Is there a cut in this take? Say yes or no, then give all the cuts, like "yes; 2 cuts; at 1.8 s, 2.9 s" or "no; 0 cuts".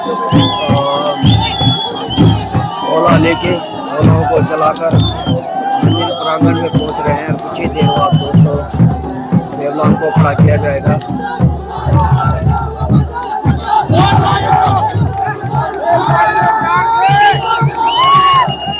no; 0 cuts